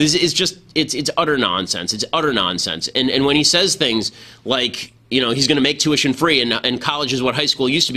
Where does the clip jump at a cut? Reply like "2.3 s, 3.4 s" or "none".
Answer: 6.6 s

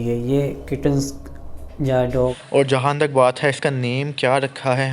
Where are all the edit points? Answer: 2.4 s

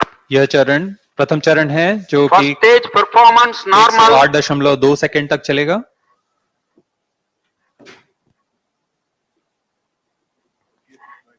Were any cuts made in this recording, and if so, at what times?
1.0 s

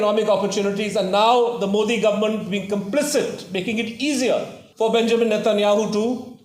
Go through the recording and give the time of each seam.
4.6 s

